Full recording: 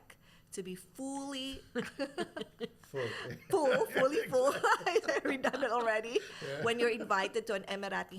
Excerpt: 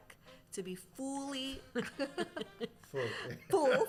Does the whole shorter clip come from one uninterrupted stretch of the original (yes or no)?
yes